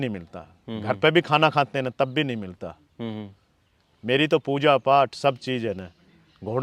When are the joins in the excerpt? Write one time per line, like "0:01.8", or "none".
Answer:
none